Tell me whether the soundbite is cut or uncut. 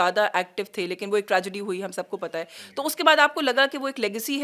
uncut